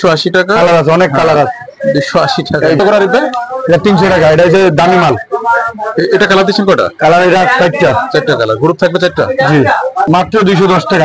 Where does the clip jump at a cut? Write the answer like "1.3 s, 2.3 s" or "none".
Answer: 2.8 s, 10.1 s